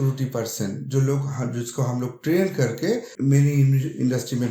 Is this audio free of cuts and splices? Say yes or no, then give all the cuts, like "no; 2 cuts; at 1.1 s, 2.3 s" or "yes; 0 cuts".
no; 1 cut; at 3.1 s